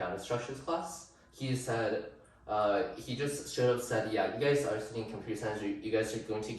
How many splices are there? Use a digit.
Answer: 0